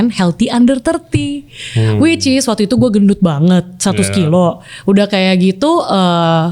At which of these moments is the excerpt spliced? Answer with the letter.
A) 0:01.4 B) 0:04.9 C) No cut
C